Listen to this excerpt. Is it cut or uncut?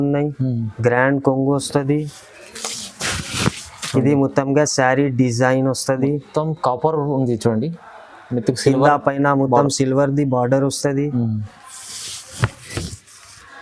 uncut